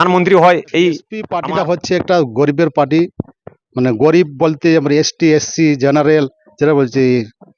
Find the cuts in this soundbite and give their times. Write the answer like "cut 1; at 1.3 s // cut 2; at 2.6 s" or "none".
cut 1; at 1.3 s